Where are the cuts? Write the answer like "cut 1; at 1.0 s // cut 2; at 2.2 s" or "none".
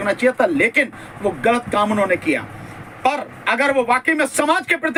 none